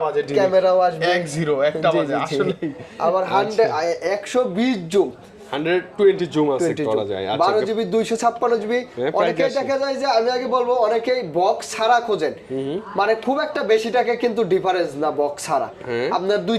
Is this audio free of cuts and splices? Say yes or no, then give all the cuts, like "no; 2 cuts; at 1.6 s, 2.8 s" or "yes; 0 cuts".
yes; 0 cuts